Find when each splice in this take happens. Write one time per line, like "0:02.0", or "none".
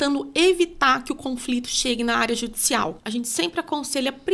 0:03.0